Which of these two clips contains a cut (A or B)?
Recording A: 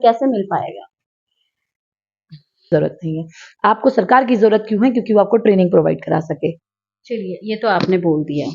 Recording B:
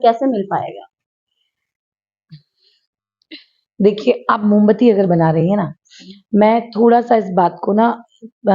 A